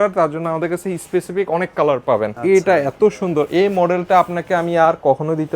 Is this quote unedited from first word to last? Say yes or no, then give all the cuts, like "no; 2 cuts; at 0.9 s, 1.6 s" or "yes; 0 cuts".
no; 1 cut; at 2.3 s